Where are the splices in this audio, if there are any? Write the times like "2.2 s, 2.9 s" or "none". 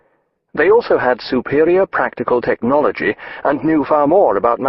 2.1 s